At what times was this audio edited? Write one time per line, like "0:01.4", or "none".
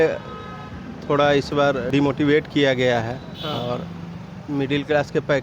0:01.9